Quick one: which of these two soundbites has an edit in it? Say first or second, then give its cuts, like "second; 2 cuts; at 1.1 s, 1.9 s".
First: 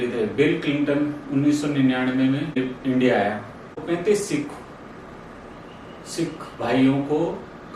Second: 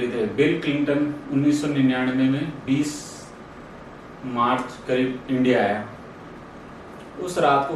first; 2 cuts; at 2.6 s, 3.8 s